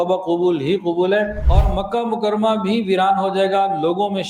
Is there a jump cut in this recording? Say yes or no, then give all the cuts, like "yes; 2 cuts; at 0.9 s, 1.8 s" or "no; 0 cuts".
yes; 1 cut; at 1.4 s